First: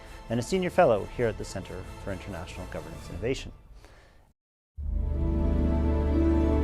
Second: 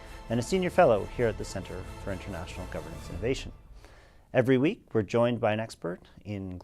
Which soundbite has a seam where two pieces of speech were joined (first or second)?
second